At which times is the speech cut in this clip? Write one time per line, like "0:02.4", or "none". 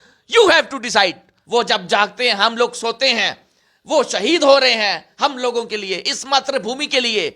0:01.3